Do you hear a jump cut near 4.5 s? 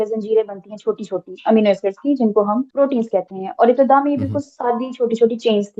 no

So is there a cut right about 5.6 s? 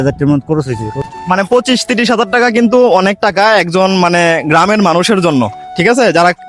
no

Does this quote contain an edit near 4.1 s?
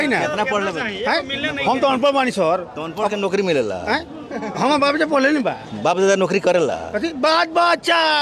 no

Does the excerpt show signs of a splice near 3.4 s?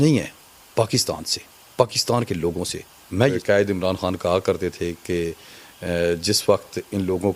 yes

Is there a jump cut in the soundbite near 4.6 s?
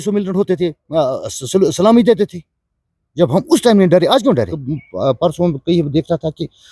yes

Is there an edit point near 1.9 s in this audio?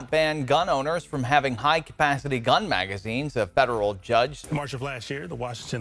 no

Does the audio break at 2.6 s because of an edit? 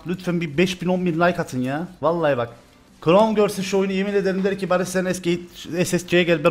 no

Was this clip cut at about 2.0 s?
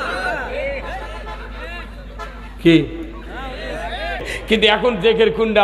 no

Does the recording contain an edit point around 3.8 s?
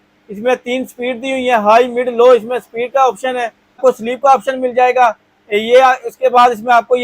yes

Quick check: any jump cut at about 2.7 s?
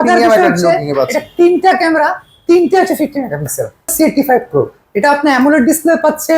no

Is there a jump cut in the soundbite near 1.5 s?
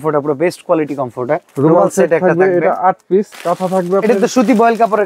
yes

